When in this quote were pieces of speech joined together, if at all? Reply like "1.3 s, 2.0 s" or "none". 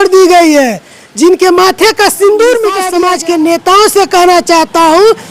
2.9 s